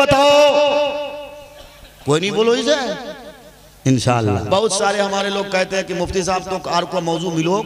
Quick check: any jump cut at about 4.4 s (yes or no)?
yes